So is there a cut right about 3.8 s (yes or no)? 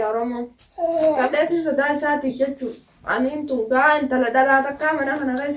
no